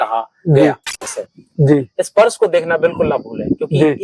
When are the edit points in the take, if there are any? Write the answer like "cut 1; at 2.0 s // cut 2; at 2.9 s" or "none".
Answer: cut 1; at 1.1 s